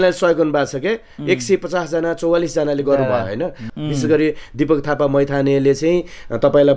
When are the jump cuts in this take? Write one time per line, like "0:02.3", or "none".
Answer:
none